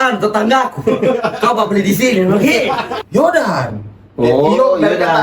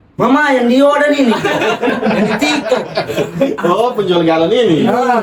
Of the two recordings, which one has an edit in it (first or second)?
first